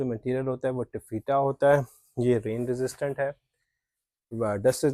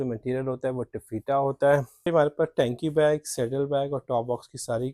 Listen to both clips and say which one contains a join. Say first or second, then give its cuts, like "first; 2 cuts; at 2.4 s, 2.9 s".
second; 1 cut; at 2.0 s